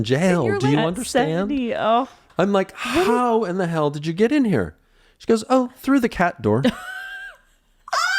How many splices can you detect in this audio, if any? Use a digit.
1